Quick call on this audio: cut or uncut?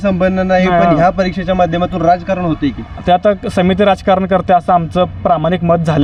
uncut